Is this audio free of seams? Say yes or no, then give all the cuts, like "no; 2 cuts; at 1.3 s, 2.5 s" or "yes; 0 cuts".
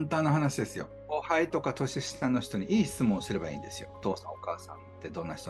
no; 2 cuts; at 1.0 s, 4.0 s